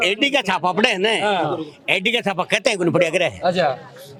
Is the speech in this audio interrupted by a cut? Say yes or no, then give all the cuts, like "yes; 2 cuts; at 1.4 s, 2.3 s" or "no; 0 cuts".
no; 0 cuts